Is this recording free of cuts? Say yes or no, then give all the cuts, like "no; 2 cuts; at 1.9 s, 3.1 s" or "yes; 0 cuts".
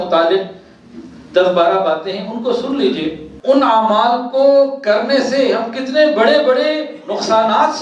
no; 1 cut; at 3.3 s